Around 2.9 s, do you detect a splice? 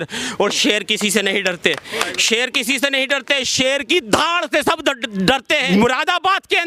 no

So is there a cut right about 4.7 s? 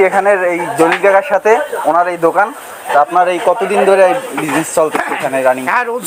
no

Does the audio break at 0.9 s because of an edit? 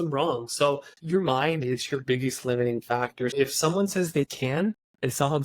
yes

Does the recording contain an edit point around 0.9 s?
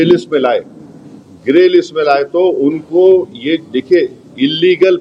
no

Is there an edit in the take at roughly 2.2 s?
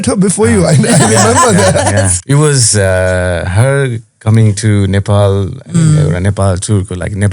yes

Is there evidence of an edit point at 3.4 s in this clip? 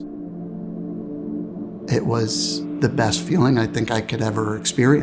no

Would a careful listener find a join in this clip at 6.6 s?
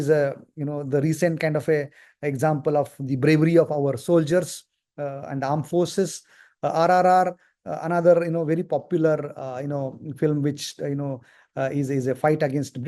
no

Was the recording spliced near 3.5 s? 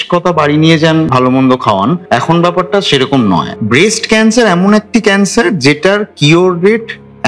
yes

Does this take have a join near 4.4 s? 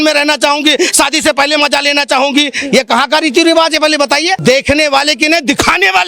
yes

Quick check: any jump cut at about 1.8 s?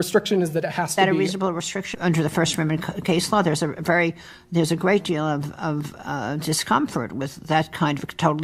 yes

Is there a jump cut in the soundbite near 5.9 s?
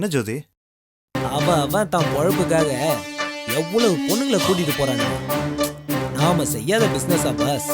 no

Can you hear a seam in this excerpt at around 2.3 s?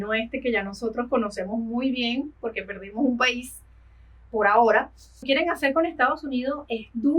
no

